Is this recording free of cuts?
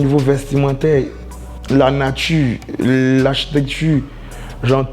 yes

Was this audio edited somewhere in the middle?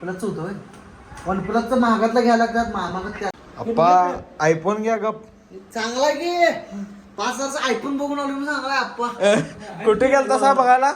yes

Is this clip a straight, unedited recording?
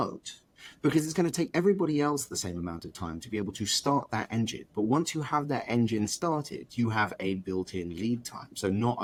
yes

